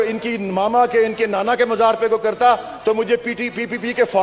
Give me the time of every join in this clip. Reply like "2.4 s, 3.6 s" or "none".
none